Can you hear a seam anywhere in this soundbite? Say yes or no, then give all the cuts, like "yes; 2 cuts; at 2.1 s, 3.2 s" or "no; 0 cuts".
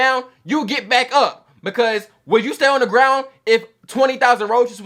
no; 0 cuts